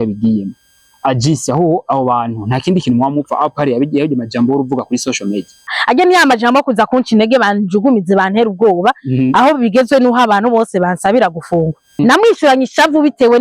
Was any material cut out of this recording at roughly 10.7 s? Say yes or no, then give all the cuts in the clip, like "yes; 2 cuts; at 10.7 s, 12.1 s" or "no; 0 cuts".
no; 2 cuts; at 5.7 s, 12.0 s